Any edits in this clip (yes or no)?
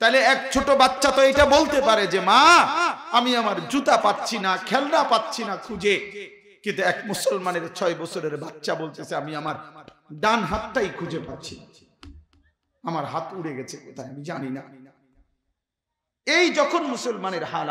no